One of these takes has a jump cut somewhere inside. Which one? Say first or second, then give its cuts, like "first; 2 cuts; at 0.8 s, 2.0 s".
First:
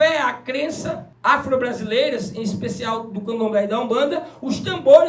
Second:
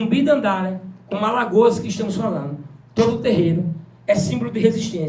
first; 1 cut; at 1.1 s